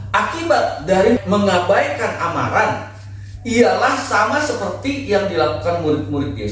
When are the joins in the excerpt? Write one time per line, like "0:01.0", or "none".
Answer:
0:01.2